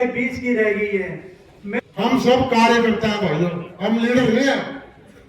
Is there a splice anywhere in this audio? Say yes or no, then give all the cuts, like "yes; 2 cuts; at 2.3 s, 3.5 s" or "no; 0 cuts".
yes; 1 cut; at 1.8 s